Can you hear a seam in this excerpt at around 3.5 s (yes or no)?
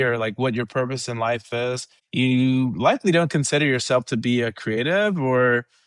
no